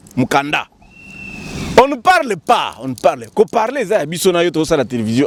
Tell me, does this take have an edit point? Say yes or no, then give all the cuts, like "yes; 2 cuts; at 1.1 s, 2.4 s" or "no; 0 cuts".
no; 0 cuts